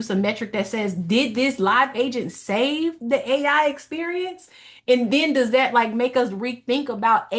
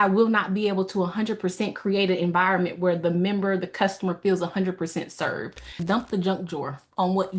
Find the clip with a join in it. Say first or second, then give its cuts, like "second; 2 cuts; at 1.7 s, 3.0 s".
second; 1 cut; at 5.8 s